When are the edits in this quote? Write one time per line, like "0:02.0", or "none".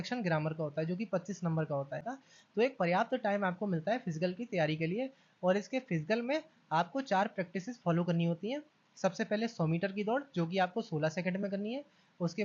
0:02.2